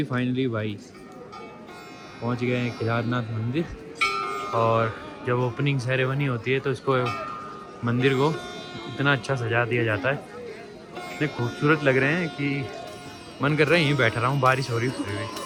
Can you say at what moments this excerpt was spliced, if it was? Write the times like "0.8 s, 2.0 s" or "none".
none